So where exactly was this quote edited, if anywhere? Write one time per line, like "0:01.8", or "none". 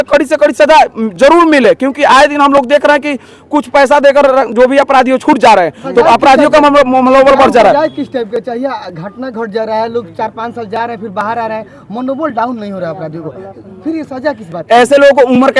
none

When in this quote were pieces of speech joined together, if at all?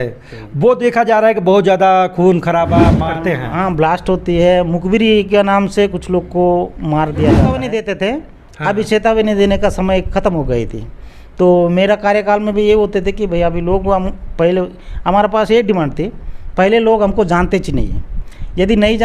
0:03.0
0:07.7

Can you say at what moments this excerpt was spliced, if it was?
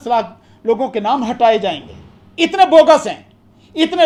none

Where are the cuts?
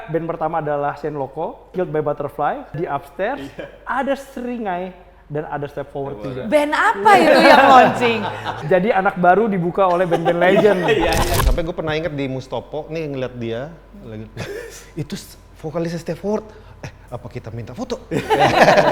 0:01.7
0:02.8
0:08.6
0:11.3

